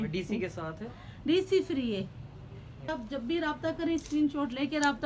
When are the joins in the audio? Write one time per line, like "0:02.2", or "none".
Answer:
0:02.9